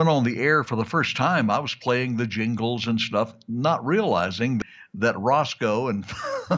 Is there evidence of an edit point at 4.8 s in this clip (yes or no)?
yes